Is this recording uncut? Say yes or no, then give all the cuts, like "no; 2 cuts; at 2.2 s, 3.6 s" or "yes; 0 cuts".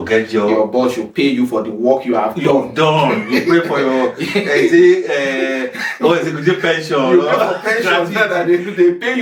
yes; 0 cuts